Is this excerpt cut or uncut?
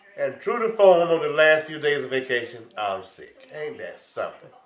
uncut